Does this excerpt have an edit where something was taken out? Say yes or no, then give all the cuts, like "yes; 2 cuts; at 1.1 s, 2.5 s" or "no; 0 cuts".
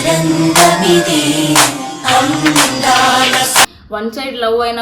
no; 0 cuts